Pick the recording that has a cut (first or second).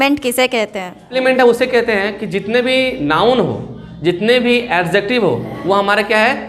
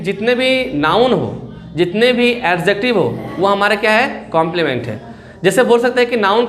first